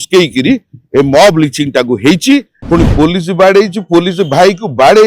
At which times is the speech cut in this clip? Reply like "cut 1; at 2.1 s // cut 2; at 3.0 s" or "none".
cut 1; at 2.5 s